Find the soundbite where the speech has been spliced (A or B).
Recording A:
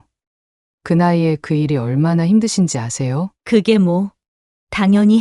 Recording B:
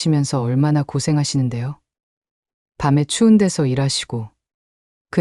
A